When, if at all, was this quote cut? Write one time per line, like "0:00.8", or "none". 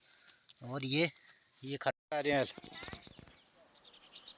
0:01.9

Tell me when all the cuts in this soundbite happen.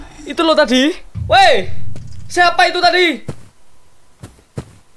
0:01.1

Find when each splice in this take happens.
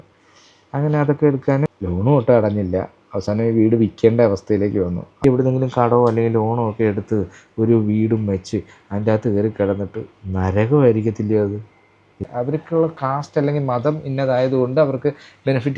0:01.7
0:05.2
0:12.3

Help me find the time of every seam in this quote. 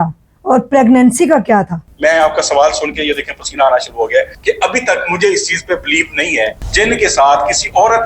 0:01.8
0:04.3
0:06.6

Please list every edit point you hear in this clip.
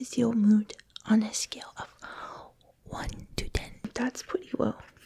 0:03.9

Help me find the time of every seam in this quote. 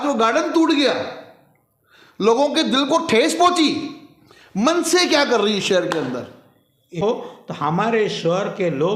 0:07.0

